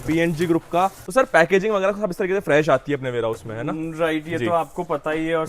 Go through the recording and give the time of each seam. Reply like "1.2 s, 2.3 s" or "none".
1.0 s